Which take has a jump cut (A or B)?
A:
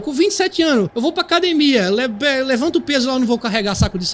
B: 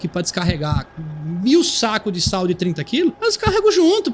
B